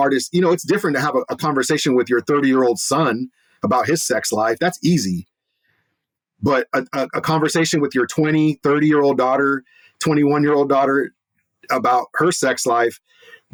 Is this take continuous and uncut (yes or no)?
yes